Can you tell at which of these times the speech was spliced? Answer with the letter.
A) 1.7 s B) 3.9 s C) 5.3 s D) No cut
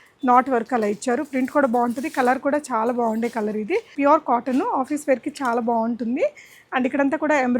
B